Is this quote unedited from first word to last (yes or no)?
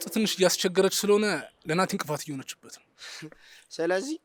yes